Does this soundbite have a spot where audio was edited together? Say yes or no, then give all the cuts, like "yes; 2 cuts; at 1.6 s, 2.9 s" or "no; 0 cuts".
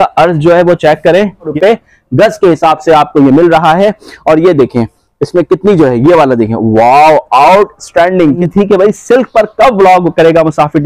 yes; 2 cuts; at 1.5 s, 8.4 s